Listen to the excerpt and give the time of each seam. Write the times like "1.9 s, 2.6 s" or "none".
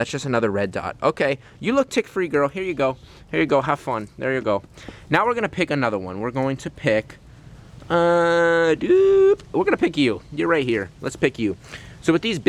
none